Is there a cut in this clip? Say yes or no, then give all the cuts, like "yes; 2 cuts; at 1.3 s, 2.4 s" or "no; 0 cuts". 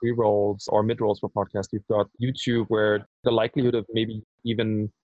yes; 2 cuts; at 0.7 s, 2.1 s